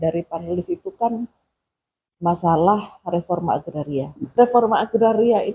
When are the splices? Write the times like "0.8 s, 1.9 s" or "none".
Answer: 4.2 s